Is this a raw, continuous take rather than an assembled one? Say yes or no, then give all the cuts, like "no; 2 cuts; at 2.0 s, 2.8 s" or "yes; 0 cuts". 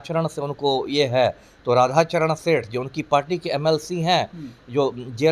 yes; 0 cuts